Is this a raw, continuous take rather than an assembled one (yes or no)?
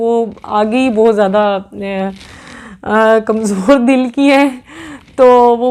yes